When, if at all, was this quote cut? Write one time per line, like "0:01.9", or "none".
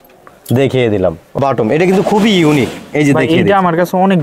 0:01.4